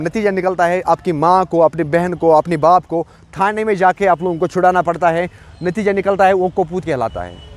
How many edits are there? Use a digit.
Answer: 0